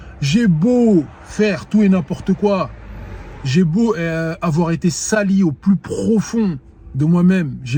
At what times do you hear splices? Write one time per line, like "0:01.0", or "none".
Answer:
none

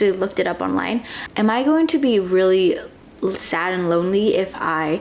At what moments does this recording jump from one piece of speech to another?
0:01.1

